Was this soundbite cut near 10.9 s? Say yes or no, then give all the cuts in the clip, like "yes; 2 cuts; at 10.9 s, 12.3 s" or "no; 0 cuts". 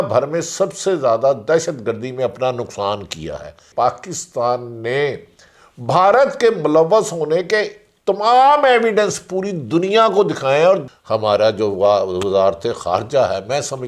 yes; 2 cuts; at 3.6 s, 10.9 s